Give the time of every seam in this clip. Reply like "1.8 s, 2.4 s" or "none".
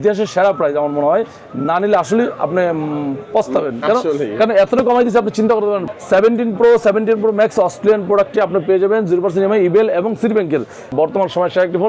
5.8 s, 10.9 s